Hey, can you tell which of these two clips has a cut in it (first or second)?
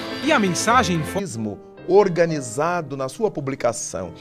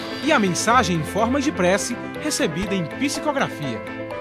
second